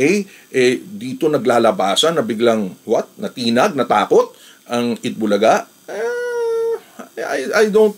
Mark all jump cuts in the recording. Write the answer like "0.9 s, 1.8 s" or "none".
none